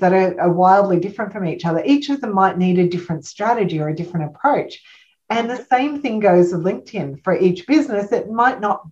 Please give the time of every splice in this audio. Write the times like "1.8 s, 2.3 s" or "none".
none